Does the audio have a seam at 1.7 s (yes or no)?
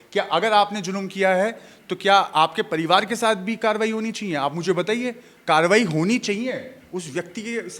no